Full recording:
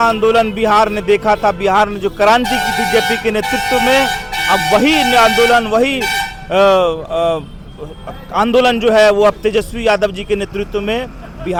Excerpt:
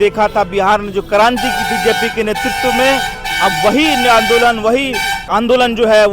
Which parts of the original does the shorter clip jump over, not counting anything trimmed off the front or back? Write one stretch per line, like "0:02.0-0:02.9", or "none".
0:06.2-0:08.2

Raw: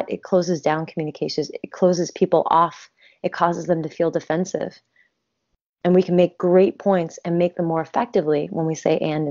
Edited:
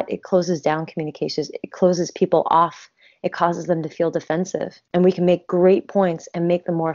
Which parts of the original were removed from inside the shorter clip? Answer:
0:04.8-0:05.7

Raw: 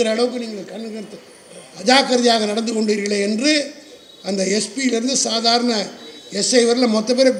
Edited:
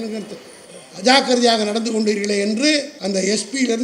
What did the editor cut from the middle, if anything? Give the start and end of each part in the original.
0:03.8-0:04.2

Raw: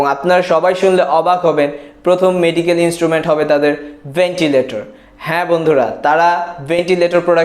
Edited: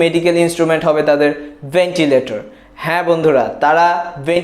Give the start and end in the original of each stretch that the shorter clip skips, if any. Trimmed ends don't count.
none

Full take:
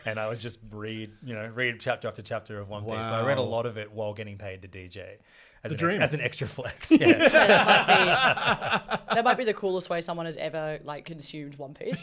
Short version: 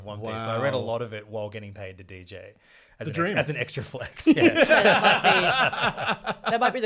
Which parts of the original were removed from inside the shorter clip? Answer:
none

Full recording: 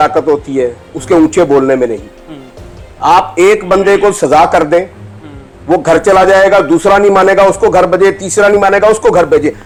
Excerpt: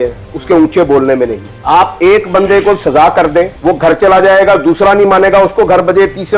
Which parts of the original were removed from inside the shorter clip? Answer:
0:02.1-0:02.8
0:04.9-0:05.6

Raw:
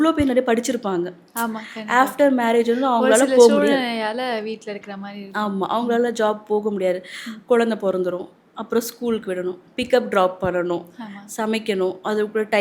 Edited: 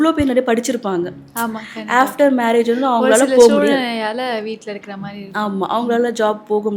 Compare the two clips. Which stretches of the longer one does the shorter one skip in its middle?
none

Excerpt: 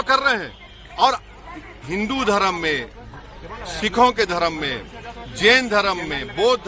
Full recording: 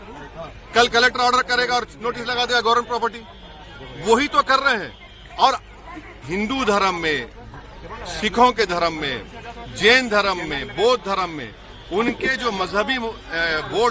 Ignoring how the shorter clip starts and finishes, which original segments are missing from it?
none

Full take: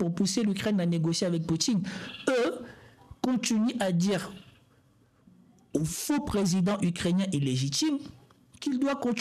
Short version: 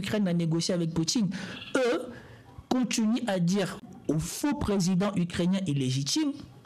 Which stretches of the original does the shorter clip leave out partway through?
0:04.4-0:05.5

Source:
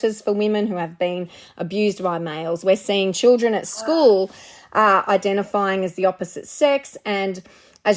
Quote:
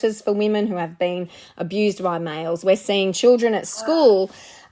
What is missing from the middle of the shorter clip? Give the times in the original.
none

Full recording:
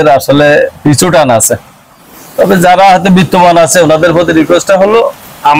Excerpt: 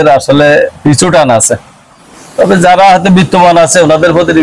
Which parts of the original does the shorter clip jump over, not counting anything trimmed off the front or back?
none

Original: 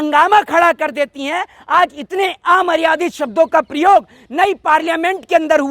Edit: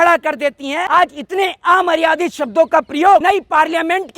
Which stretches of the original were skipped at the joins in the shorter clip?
0:01.4-0:01.6
0:04.0-0:04.4

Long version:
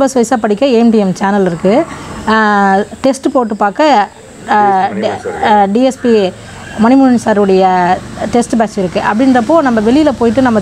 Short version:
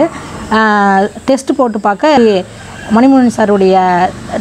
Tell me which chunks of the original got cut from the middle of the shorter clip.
0:03.9-0:06.1

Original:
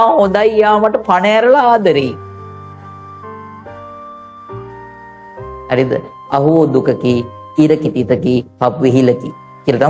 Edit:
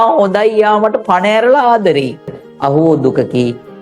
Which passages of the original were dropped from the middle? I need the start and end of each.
0:02.4-0:06.1

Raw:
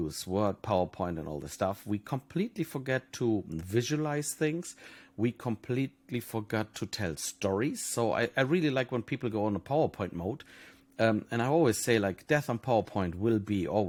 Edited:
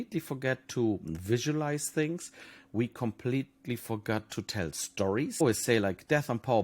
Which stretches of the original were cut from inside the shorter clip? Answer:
0:07.8-0:11.6

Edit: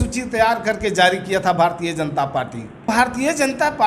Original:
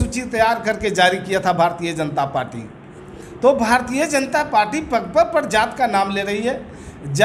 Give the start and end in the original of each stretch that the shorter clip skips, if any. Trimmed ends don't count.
0:02.9-0:03.6

